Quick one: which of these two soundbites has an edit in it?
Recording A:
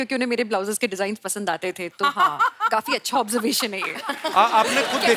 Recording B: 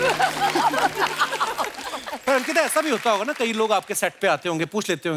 B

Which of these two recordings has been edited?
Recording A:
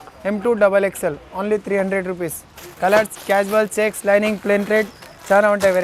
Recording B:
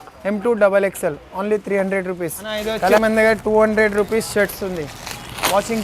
B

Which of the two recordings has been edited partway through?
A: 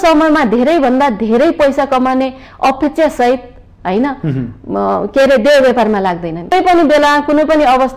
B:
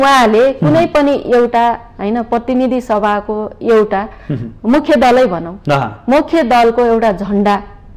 A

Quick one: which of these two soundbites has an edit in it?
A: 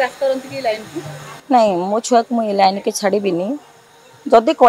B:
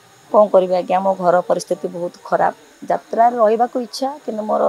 B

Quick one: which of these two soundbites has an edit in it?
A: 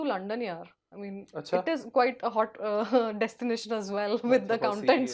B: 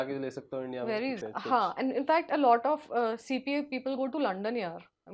B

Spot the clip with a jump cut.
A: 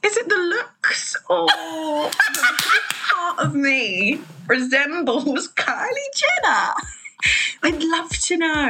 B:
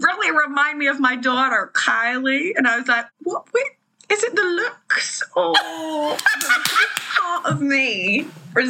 B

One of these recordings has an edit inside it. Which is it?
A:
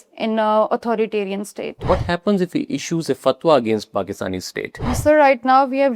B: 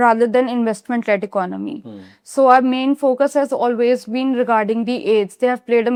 A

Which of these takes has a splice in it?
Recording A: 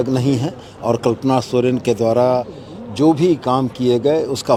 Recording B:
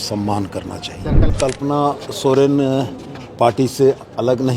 B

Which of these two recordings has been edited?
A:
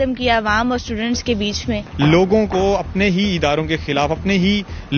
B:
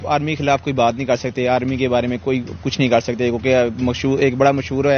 A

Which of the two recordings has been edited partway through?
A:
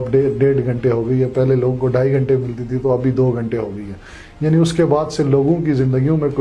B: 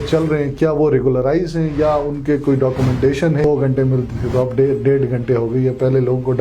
B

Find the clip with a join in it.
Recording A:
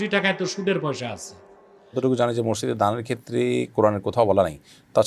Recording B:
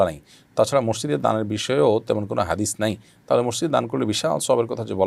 A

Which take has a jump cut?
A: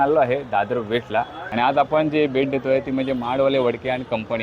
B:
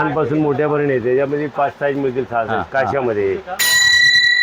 A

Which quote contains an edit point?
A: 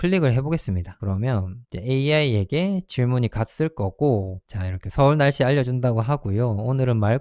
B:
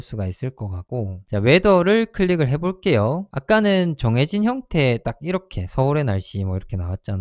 B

